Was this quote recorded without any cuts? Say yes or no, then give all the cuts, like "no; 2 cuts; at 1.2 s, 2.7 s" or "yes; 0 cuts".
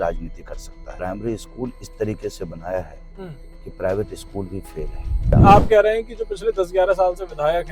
no; 2 cuts; at 0.9 s, 5.3 s